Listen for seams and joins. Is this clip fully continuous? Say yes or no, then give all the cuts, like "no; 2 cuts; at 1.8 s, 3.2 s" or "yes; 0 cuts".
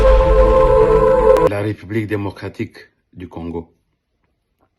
no; 1 cut; at 1.5 s